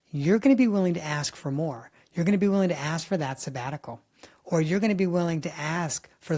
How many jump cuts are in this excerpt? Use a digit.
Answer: 0